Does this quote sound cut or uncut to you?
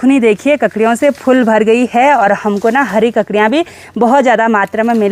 uncut